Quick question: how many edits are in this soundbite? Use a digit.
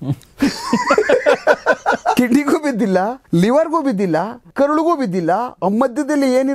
3